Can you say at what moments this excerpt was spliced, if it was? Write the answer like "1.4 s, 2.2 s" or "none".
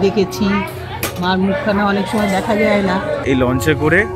3.2 s